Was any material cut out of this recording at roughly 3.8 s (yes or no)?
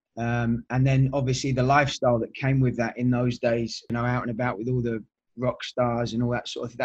yes